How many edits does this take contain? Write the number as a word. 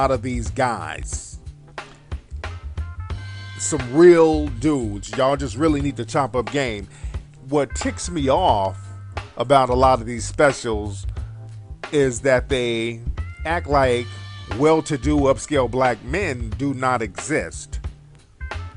one